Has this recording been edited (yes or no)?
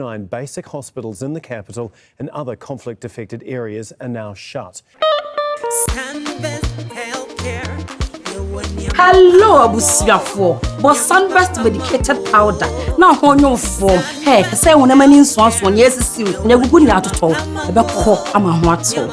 yes